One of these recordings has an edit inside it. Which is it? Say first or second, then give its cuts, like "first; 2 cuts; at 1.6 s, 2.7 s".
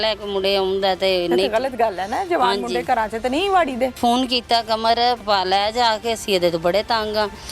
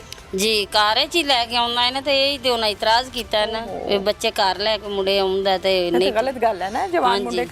first; 2 cuts; at 4.0 s, 5.2 s